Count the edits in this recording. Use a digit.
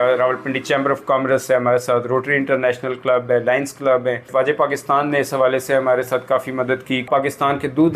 2